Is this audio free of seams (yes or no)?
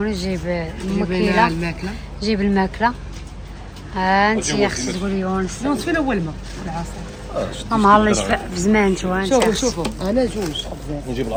yes